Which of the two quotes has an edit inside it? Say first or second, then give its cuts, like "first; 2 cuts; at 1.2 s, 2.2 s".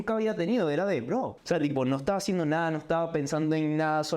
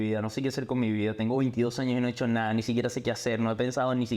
first; 1 cut; at 1.4 s